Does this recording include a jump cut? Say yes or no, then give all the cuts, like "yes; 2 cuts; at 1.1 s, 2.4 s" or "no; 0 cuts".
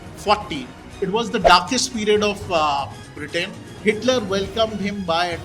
yes; 1 cut; at 0.9 s